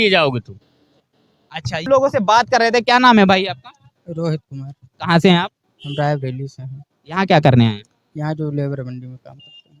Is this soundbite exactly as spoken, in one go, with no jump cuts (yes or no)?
no